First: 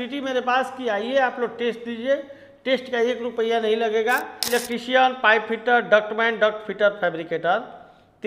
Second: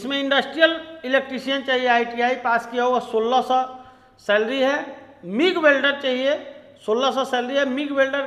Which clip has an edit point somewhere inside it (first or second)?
first